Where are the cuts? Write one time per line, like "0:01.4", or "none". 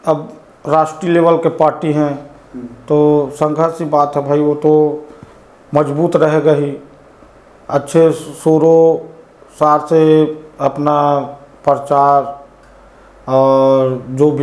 none